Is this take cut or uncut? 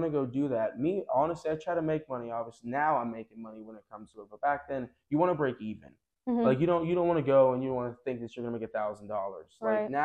uncut